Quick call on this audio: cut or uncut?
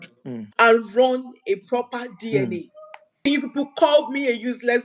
cut